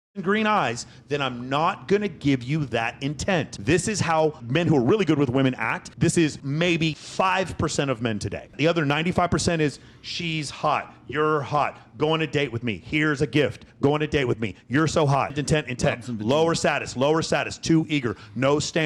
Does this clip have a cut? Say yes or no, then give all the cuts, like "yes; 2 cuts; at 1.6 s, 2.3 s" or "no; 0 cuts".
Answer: yes; 3 cuts; at 6.7 s, 8.6 s, 15.4 s